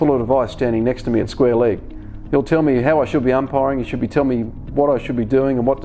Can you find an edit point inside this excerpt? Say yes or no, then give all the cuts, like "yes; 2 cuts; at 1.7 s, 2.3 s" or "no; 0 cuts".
no; 0 cuts